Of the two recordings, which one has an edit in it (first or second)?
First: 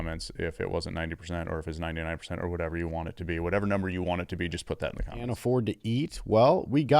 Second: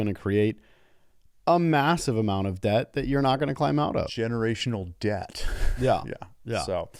first